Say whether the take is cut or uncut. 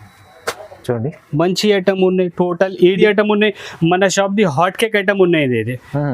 cut